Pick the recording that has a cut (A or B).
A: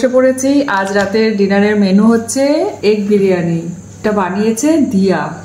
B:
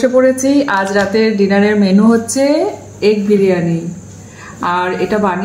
A